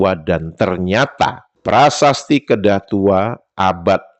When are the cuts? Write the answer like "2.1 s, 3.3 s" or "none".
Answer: 1.6 s